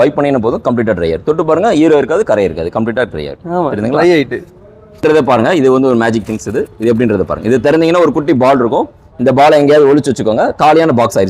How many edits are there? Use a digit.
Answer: 1